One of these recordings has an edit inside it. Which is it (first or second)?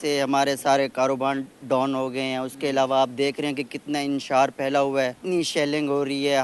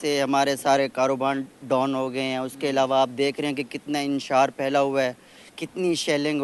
first